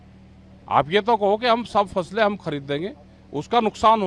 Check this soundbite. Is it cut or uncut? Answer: uncut